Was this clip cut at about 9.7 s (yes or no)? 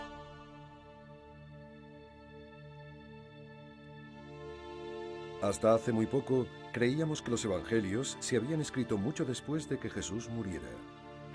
no